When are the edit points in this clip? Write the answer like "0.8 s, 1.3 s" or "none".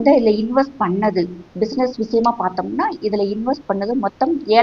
none